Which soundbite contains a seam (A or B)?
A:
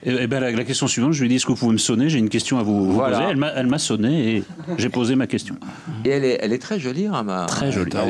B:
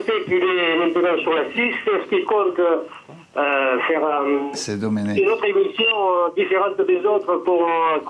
B